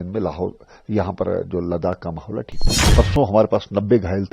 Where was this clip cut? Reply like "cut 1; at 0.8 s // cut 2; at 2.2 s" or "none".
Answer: cut 1; at 2.9 s